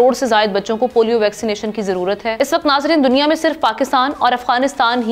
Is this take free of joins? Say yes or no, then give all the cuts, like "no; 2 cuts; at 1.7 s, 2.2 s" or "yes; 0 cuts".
yes; 0 cuts